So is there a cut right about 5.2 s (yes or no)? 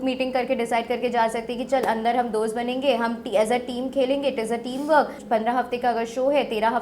yes